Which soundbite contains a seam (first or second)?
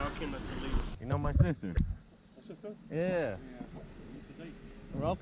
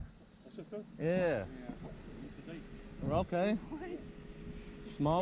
first